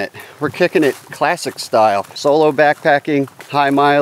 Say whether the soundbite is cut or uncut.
cut